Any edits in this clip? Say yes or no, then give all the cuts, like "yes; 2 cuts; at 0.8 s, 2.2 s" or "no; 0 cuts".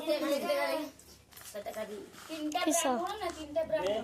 no; 0 cuts